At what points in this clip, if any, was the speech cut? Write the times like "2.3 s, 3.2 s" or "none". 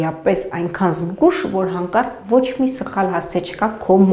none

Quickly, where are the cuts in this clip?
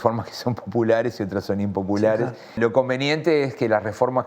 2.5 s

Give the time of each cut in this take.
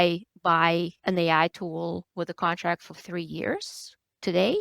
0.9 s, 2.1 s

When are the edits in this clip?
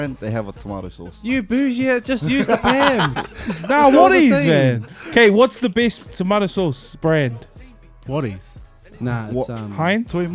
none

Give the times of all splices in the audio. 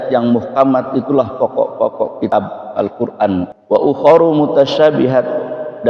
2.3 s, 3.6 s

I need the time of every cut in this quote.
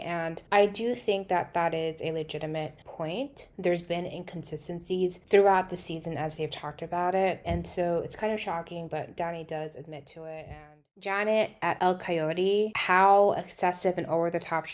10.9 s

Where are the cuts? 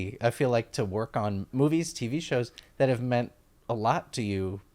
1.5 s

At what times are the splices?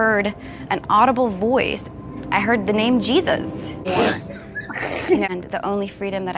3.8 s, 5.3 s

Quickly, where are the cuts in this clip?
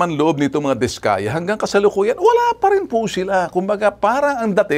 none

